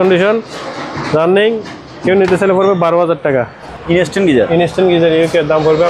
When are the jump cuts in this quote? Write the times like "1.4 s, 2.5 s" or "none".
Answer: 3.6 s